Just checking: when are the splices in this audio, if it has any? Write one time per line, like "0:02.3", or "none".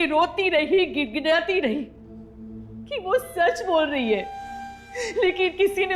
none